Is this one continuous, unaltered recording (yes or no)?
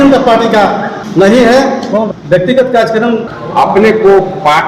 no